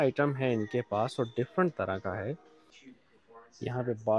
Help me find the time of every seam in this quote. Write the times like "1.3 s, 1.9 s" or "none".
none